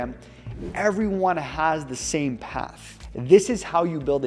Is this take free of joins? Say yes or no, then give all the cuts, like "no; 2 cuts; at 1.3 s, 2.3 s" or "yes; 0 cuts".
no; 1 cut; at 2.8 s